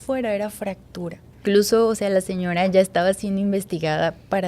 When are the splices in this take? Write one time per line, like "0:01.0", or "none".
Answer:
0:01.4